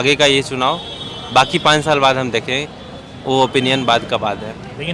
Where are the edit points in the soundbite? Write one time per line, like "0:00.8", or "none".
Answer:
none